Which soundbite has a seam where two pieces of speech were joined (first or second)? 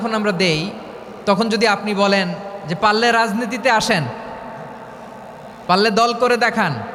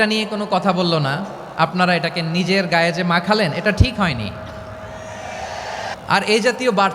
second